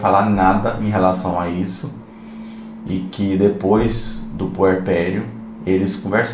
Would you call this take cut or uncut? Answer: uncut